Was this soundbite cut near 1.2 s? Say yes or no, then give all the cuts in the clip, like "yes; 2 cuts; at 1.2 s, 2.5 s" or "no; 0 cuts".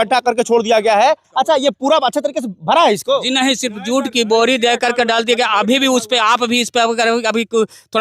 yes; 1 cut; at 1.2 s